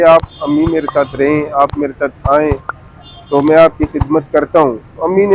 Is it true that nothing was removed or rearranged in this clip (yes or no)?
yes